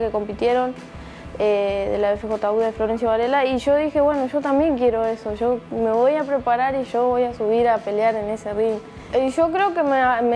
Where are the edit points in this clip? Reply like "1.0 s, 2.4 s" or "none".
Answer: 9.0 s